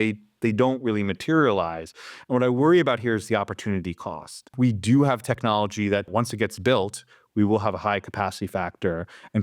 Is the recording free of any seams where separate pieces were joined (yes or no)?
no